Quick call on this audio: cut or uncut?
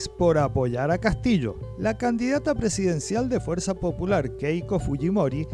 uncut